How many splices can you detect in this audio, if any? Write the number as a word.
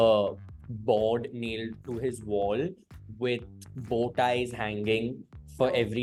zero